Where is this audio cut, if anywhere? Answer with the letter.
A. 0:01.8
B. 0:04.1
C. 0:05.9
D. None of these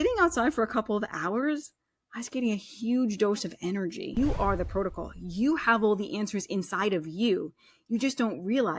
B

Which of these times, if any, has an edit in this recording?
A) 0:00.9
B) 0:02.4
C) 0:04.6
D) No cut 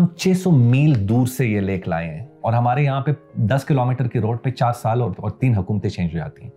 B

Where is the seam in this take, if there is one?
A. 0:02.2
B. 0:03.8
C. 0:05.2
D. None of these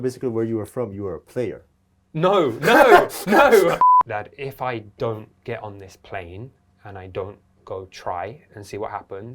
B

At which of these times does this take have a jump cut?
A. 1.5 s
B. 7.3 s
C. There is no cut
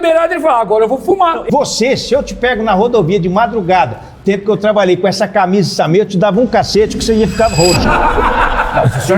A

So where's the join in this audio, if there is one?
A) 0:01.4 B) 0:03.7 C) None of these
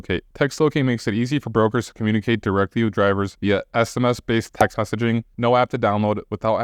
C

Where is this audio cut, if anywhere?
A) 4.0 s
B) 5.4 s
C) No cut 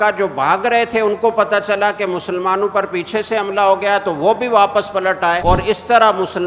B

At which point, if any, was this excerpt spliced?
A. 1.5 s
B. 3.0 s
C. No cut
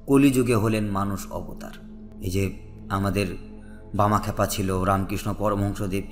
A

